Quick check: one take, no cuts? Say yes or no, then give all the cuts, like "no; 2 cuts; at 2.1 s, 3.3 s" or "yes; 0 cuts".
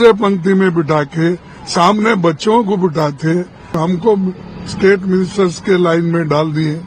no; 1 cut; at 3.8 s